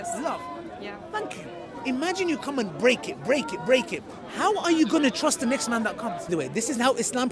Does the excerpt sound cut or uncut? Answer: cut